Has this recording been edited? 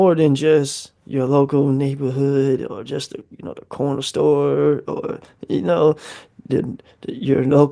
no; 0 cuts

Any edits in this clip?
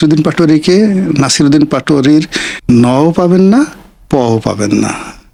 no; 0 cuts

